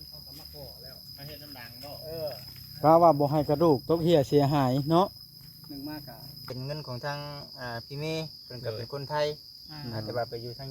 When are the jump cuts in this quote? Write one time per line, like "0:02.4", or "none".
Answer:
0:06.5